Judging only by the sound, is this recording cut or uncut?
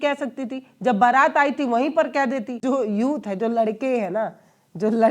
cut